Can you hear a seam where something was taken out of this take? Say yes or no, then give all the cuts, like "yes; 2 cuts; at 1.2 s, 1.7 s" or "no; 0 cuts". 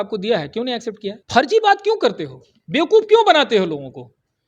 yes; 1 cut; at 1.2 s